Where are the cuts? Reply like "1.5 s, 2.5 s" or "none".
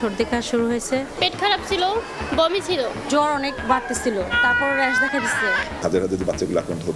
1.1 s, 3.0 s, 4.3 s, 5.8 s